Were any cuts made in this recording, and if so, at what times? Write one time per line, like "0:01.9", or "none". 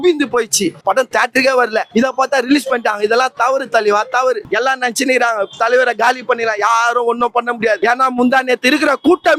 0:00.8
0:01.9
0:04.4
0:07.8